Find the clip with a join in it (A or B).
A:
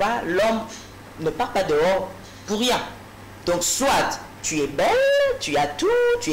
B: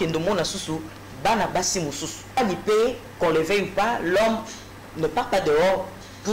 B